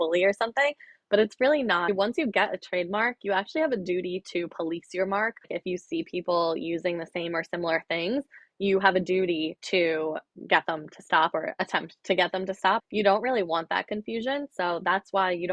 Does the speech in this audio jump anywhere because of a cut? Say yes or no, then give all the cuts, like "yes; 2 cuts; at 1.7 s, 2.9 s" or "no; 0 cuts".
yes; 5 cuts; at 1.9 s, 5.5 s, 9.6 s, 10.3 s, 12.9 s